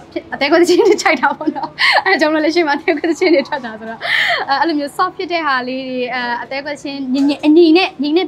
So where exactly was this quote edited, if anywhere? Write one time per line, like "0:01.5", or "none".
none